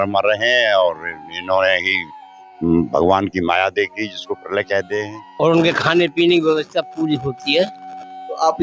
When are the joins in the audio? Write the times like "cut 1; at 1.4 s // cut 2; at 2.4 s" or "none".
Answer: cut 1; at 5.2 s